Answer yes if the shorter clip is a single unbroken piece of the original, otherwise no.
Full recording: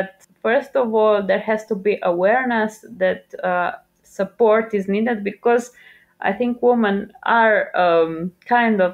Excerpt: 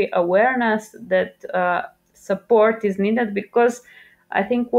yes